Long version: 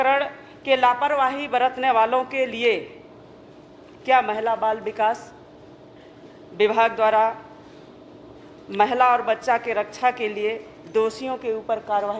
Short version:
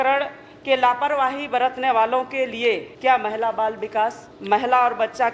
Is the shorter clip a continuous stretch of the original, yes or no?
no